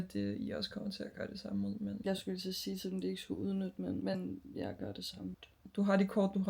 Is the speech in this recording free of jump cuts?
no; 1 cut; at 5.3 s

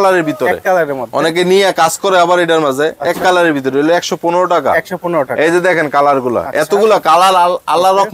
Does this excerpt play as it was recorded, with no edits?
yes; 0 cuts

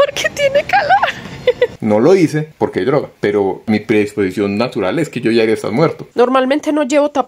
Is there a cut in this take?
yes; 3 cuts; at 1.8 s, 3.6 s, 6.0 s

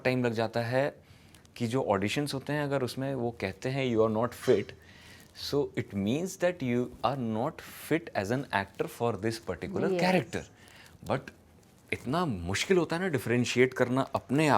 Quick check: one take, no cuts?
yes; 0 cuts

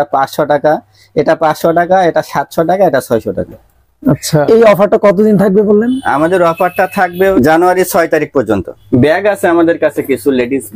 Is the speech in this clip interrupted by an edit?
no; 0 cuts

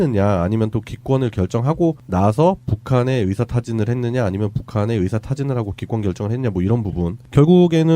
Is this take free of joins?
no; 1 cut; at 6.7 s

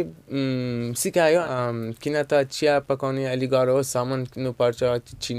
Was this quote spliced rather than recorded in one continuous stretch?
yes; 1 cut; at 1.5 s

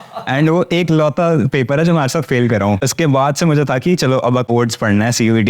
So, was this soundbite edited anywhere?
yes; 2 cuts; at 2.9 s, 4.5 s

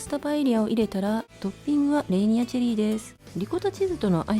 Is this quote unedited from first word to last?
no; 2 cuts; at 1.3 s, 3.2 s

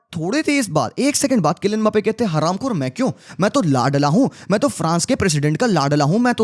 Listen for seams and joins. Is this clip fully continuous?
yes; 0 cuts

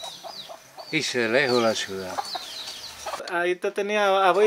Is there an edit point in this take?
yes; 1 cut; at 3.2 s

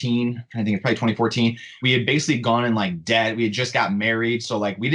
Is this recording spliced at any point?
yes; 1 cut; at 1.7 s

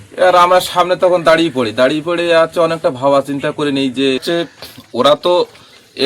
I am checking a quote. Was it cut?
yes; 1 cut; at 4.2 s

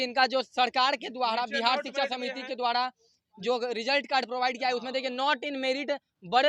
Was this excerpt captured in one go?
yes; 0 cuts

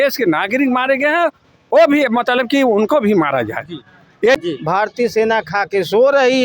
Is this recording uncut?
no; 1 cut; at 4.4 s

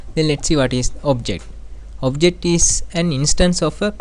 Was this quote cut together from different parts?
no; 0 cuts

